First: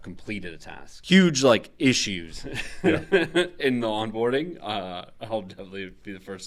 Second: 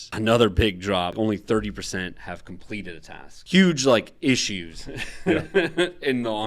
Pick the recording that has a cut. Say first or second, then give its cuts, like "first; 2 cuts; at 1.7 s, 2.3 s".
second; 1 cut; at 1.1 s